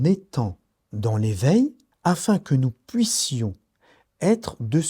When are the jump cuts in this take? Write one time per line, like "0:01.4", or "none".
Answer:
0:01.9